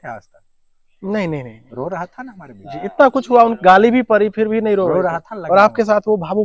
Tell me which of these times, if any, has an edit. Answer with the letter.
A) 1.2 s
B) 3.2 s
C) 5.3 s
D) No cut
D